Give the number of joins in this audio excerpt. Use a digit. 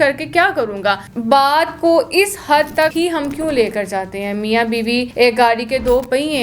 2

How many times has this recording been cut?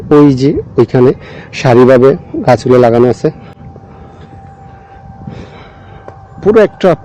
0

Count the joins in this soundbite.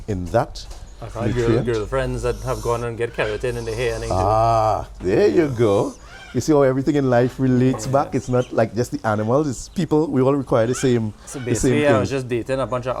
0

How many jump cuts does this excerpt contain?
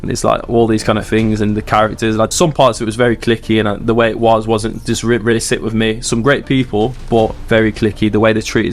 2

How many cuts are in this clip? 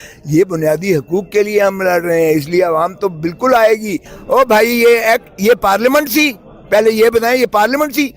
1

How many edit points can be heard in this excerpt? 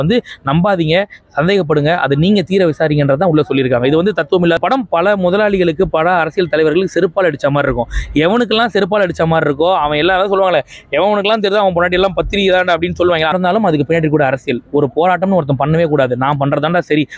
2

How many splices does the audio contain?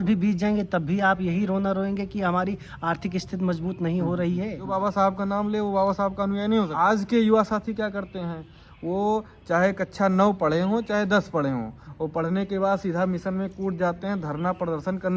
2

